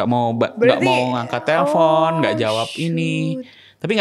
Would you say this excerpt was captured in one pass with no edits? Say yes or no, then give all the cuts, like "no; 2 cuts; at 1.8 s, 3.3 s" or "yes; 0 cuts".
yes; 0 cuts